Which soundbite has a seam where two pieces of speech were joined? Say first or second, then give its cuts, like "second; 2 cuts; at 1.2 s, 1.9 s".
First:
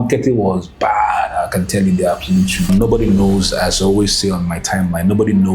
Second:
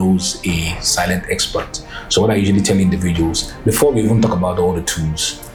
first; 1 cut; at 2.7 s